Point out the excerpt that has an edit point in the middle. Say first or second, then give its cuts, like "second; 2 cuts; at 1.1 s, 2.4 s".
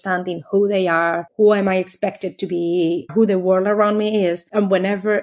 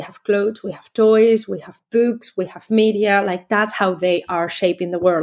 first; 3 cuts; at 1.2 s, 3.1 s, 4.4 s